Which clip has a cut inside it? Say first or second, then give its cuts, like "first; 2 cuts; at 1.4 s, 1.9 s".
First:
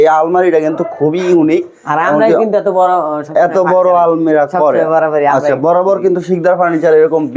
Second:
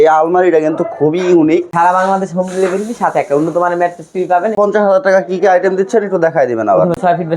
second; 2 cuts; at 1.7 s, 4.6 s